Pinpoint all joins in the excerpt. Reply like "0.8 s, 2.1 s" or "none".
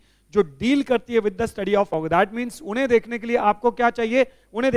1.9 s